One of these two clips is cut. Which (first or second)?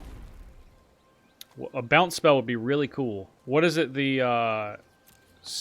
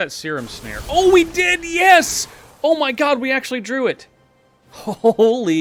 first